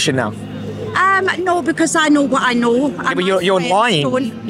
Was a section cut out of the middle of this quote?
no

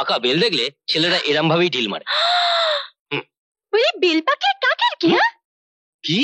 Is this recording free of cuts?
yes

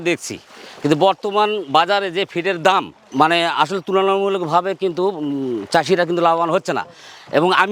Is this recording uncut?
yes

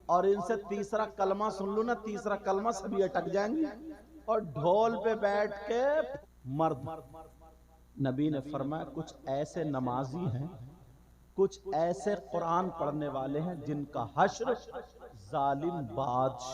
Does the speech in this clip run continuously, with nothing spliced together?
no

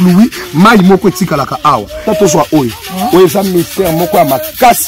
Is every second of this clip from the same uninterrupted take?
no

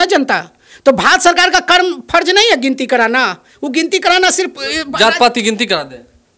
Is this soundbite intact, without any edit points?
yes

